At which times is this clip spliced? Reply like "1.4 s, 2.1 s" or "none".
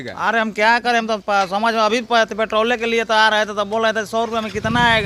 none